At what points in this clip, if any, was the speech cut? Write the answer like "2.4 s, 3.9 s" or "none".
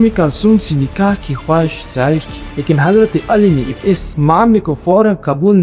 3.8 s